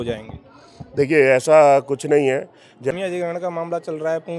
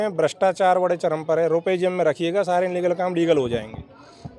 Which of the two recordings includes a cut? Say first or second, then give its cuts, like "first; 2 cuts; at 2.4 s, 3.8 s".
first; 1 cut; at 3.0 s